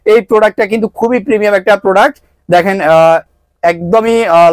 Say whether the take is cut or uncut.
uncut